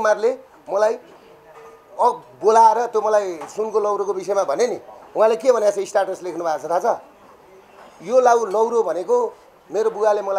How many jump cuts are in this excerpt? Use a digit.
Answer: 0